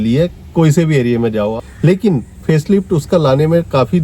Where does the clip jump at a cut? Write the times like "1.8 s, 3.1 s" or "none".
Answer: 1.5 s